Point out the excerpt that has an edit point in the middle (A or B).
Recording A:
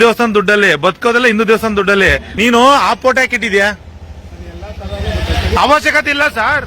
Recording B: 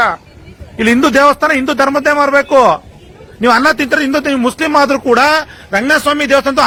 A